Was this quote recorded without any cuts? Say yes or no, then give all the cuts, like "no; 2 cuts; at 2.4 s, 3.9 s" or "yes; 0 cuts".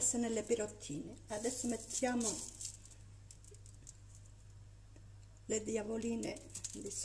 yes; 0 cuts